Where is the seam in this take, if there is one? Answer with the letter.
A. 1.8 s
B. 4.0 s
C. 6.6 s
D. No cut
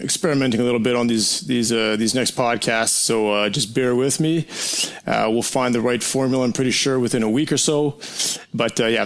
A